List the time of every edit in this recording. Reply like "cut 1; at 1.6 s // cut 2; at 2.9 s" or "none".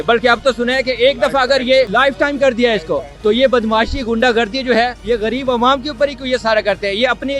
cut 1; at 1.9 s // cut 2; at 3.1 s // cut 3; at 5.0 s